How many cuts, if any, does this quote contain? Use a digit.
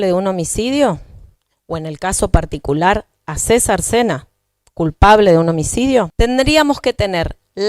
1